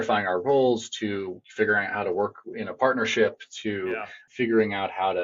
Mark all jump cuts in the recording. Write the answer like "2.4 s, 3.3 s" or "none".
1.4 s, 4.2 s